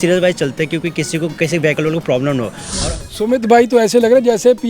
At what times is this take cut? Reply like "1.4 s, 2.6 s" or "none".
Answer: 2.8 s